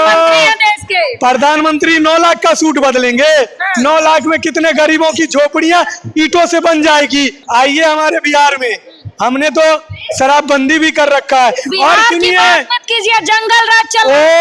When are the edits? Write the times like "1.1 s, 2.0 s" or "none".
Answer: 7.4 s